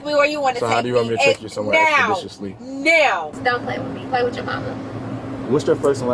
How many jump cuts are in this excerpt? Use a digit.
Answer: 1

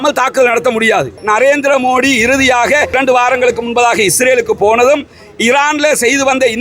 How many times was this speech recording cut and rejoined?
2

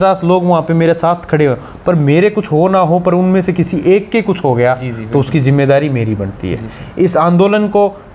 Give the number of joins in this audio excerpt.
0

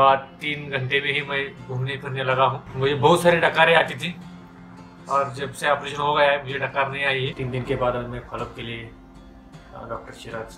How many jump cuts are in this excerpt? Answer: 2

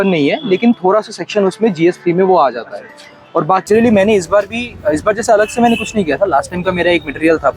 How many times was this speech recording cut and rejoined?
1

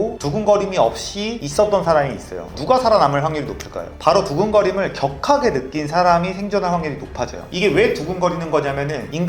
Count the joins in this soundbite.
0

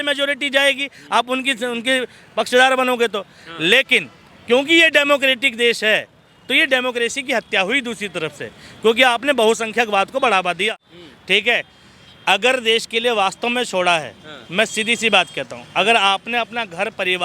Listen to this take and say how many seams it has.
1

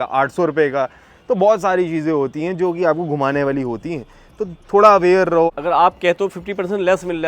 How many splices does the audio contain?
1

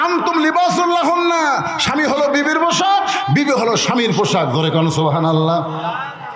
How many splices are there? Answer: 0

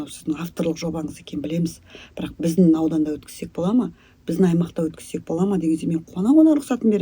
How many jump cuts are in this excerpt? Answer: 0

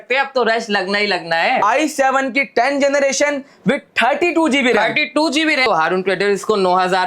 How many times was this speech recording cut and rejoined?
2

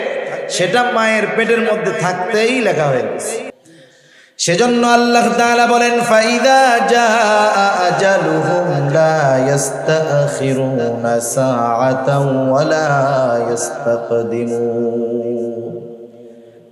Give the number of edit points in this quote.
1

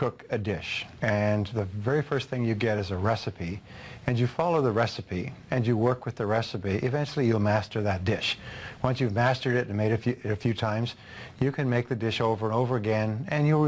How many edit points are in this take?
0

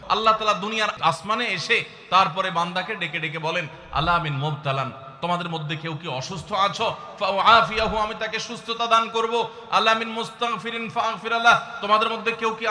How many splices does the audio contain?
1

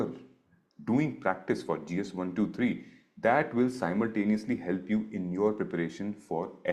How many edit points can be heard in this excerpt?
0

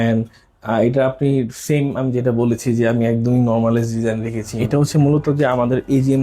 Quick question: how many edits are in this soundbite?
1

